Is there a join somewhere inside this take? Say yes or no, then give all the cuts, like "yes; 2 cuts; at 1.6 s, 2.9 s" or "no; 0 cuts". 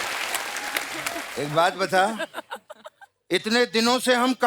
yes; 1 cut; at 1.2 s